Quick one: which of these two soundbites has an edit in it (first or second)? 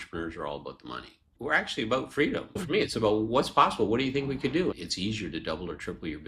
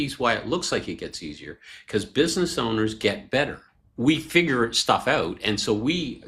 first